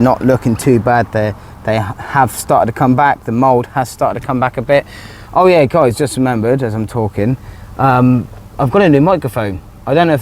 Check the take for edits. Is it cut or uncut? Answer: uncut